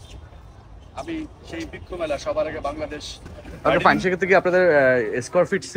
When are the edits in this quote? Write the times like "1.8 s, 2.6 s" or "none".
3.8 s